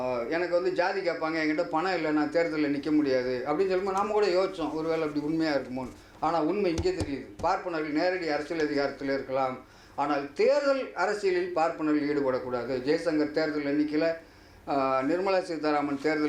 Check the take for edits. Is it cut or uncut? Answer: uncut